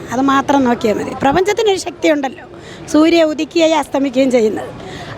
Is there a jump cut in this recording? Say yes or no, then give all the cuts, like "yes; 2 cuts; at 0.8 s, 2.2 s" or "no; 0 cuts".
yes; 1 cut; at 1.2 s